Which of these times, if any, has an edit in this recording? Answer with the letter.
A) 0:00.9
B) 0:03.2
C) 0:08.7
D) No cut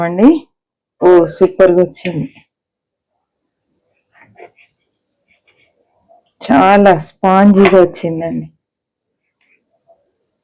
A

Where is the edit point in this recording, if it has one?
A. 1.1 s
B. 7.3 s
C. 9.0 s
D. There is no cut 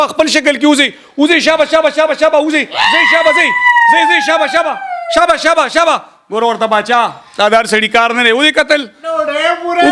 D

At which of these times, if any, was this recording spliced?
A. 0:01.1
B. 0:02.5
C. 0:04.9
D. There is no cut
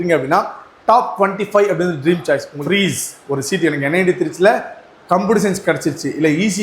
B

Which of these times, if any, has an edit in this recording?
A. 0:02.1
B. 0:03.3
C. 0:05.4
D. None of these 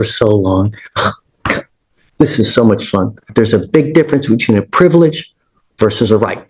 B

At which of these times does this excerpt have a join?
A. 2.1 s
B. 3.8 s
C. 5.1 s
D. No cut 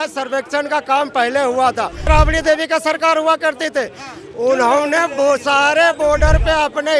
A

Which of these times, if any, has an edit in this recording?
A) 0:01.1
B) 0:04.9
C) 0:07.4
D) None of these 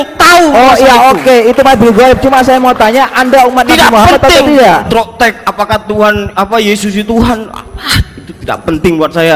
B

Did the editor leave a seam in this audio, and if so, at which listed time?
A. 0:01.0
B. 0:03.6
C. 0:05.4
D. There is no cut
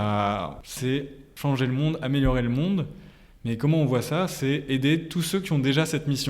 A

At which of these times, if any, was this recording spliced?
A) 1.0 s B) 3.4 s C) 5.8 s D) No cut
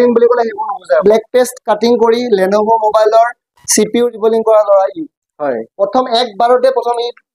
A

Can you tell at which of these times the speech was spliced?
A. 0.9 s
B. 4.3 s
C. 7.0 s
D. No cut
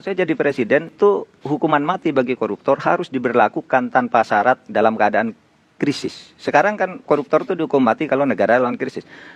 A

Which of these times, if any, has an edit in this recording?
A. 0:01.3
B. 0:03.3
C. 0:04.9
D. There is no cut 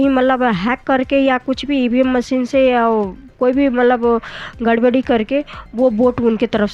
D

